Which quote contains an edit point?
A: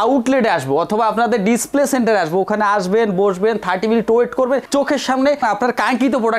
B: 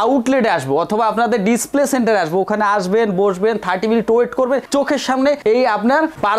A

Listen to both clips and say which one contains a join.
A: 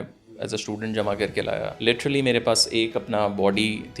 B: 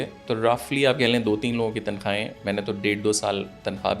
A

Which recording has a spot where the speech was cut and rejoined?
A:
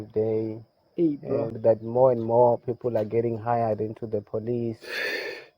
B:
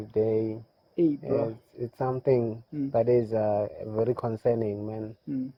A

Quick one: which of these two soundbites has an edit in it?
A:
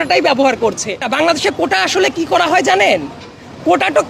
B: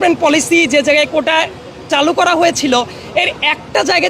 A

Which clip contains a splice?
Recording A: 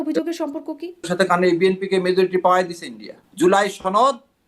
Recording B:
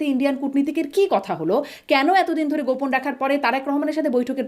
A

